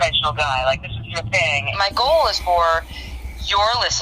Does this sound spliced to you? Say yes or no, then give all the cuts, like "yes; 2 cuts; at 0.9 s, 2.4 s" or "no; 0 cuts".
yes; 1 cut; at 1.7 s